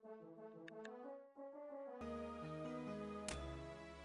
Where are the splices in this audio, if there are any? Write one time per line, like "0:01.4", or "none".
0:02.0